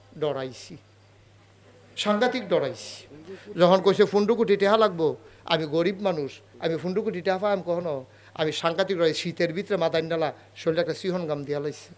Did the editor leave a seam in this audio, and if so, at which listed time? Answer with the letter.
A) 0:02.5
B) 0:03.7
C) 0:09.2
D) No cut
D